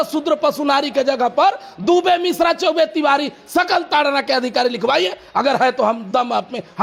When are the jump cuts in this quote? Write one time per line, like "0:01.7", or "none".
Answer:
none